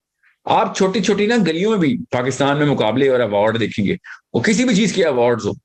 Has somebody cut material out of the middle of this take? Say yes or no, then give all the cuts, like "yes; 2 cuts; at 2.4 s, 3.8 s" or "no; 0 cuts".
no; 0 cuts